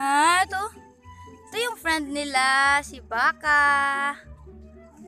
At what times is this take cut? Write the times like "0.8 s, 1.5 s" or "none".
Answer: 4.1 s

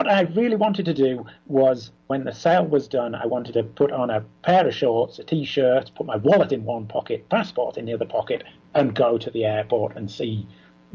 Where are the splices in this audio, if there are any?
2.0 s

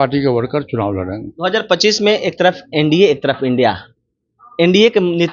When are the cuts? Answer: none

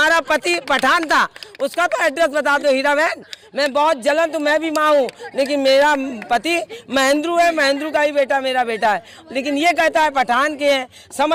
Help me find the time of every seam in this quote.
none

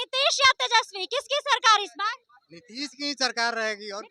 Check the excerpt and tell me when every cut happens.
none

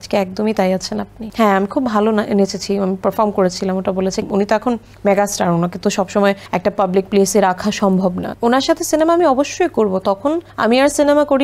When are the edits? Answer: 1.2 s, 4.3 s, 6.5 s, 8.3 s, 10.5 s

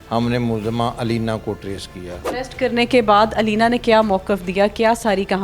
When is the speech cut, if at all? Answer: 2.2 s

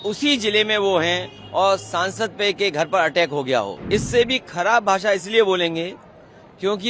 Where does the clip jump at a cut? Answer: 3.8 s

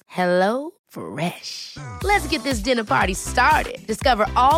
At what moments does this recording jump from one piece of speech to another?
none

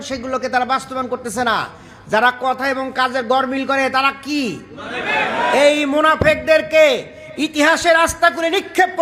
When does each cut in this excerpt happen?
none

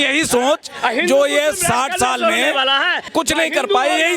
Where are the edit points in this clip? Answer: 3.1 s

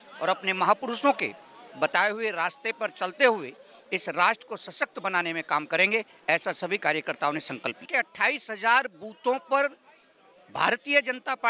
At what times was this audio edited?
7.9 s

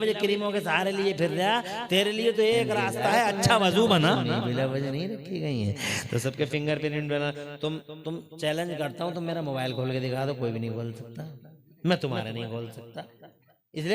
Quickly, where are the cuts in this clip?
4.3 s

